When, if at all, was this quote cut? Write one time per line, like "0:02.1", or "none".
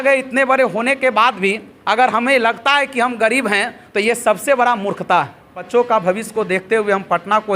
0:05.7

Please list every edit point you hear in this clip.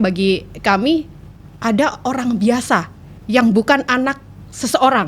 none

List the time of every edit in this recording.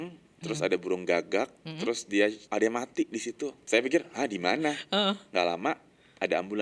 0:02.4
0:03.6

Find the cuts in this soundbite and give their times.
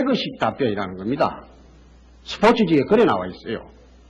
0:03.1

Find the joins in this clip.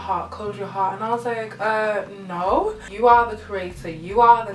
0:02.8

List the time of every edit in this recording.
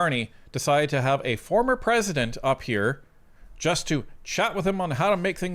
none

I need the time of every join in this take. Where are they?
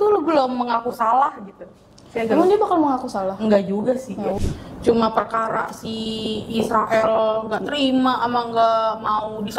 0:04.4

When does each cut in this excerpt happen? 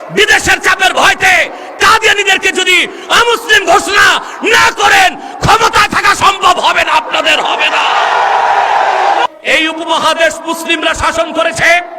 0:09.2

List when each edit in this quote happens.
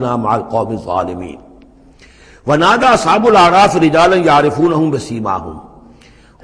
none

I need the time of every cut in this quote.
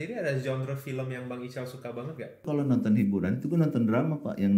0:02.4

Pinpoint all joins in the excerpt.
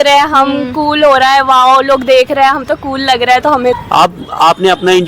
0:03.8

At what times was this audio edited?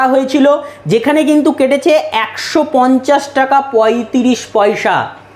none

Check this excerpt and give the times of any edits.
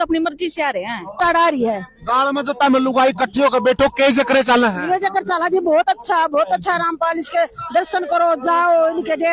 0:01.2

